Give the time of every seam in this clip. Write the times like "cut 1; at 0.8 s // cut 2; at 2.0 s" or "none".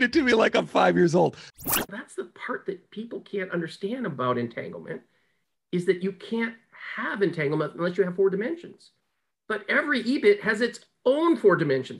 cut 1; at 1.6 s